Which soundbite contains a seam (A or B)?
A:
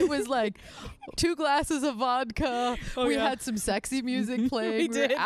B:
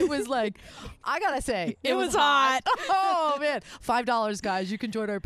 B